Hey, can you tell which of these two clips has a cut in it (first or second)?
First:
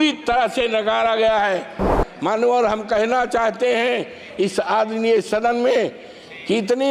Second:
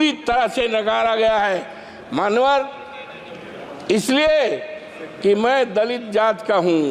first